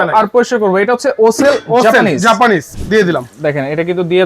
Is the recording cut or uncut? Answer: cut